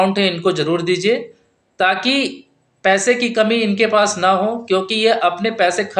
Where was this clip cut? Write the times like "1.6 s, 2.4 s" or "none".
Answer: none